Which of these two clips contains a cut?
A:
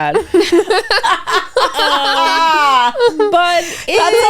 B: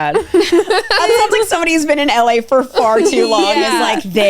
B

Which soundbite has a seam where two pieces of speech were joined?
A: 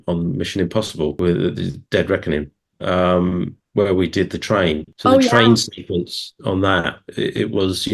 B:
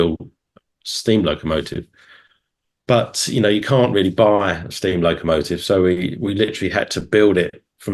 A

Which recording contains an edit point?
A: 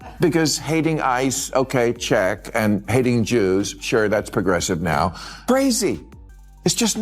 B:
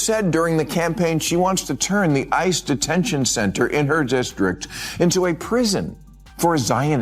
A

